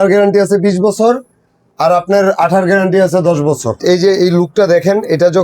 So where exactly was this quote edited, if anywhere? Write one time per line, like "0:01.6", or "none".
0:03.8